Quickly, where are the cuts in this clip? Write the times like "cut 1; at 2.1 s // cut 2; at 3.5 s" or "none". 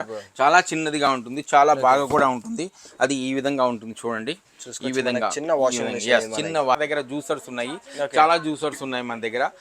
cut 1; at 6.8 s